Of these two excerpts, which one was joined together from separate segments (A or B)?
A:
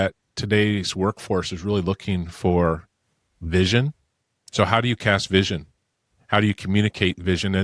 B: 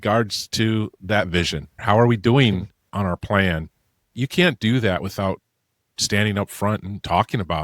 B